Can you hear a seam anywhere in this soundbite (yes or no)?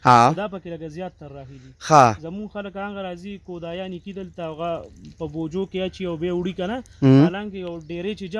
no